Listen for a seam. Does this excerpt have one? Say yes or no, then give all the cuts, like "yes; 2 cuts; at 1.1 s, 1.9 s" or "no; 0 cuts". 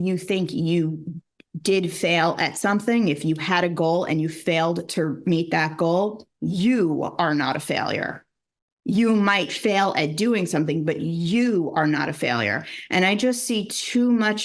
no; 0 cuts